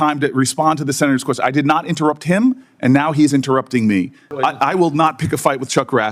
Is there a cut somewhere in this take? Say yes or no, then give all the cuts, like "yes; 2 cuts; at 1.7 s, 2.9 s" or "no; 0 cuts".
yes; 1 cut; at 4.3 s